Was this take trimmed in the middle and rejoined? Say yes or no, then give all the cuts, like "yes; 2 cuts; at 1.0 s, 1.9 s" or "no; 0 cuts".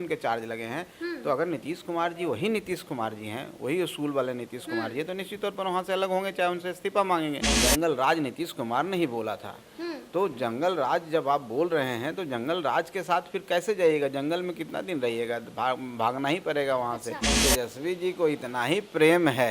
yes; 2 cuts; at 7.5 s, 17.3 s